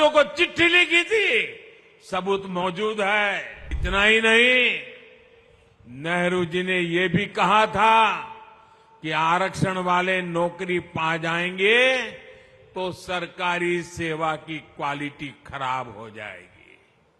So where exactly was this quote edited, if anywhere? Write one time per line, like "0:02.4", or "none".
0:03.8